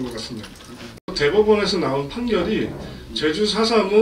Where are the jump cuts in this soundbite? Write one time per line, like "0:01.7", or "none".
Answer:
0:01.1